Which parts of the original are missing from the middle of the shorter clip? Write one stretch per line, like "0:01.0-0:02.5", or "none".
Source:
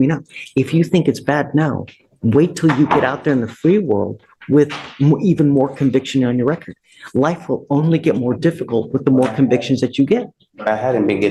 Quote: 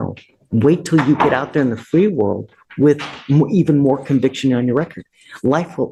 none